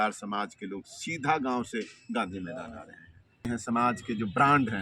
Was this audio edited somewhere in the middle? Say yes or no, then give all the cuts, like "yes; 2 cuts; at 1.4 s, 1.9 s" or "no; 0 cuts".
yes; 1 cut; at 3.5 s